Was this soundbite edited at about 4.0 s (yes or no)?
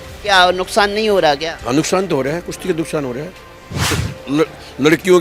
yes